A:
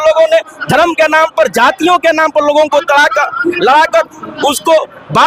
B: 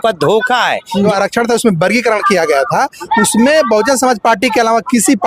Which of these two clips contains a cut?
B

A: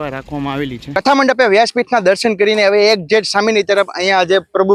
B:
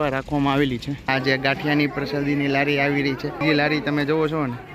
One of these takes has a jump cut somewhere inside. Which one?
B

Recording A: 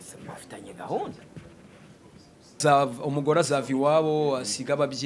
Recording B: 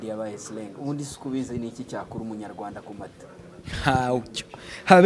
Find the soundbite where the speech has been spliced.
A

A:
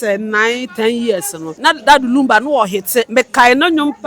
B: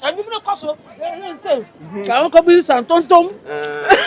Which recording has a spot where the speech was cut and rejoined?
A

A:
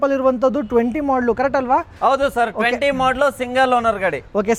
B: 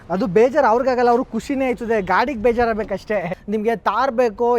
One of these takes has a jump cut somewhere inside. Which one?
B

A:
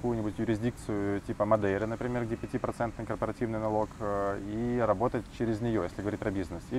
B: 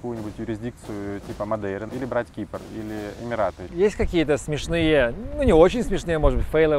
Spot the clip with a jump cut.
B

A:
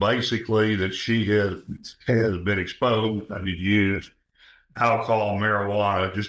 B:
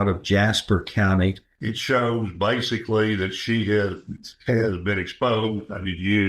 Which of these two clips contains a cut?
B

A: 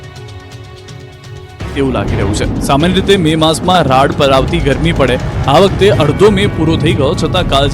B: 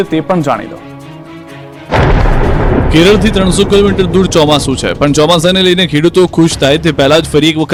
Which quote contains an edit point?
A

